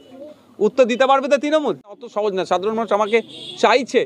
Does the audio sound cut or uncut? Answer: cut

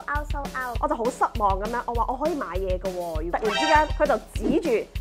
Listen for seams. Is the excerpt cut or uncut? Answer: cut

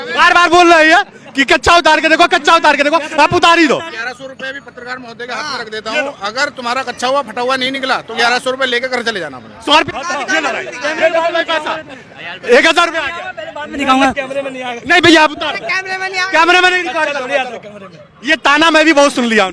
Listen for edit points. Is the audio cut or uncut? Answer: uncut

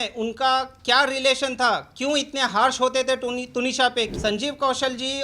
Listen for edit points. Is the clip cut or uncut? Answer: cut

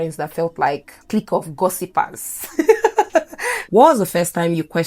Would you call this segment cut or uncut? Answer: cut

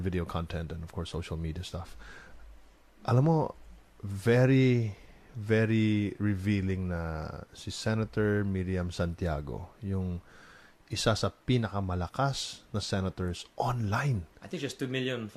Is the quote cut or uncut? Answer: uncut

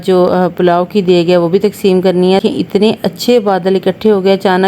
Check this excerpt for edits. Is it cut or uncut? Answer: cut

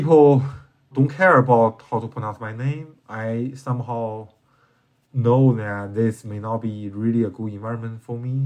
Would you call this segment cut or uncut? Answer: cut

